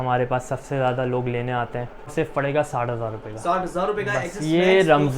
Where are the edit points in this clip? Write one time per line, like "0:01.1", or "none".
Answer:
0:02.1